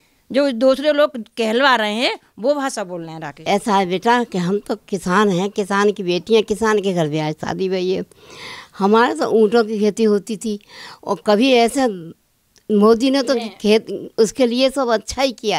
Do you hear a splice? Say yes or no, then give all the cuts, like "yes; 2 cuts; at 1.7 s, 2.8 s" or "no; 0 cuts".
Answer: yes; 1 cut; at 3.3 s